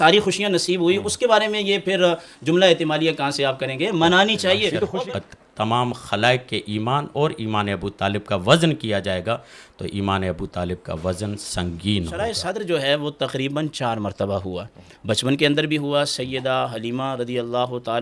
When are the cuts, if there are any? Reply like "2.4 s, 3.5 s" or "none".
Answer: 5.0 s, 12.4 s